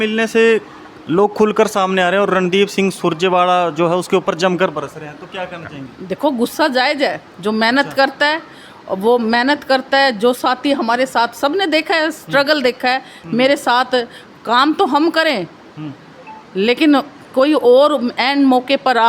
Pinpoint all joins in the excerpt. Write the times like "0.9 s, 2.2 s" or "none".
none